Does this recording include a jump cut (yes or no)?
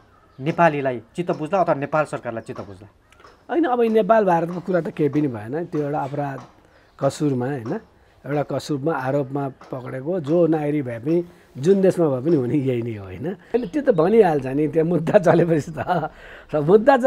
yes